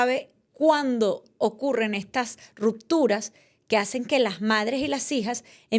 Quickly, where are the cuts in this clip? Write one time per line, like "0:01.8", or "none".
none